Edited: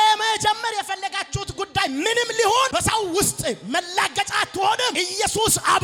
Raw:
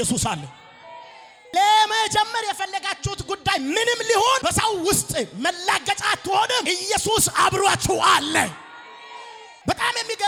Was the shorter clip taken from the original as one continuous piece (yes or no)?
yes